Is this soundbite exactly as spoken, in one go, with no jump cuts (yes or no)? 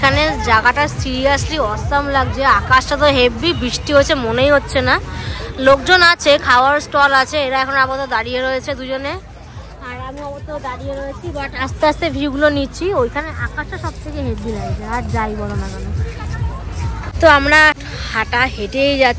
yes